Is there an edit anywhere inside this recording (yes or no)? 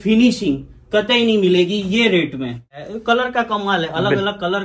yes